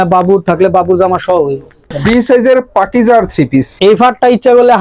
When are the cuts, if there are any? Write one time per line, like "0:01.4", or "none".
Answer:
0:02.0
0:03.7